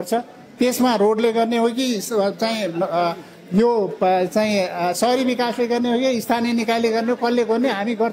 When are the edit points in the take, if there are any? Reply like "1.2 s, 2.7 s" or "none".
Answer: none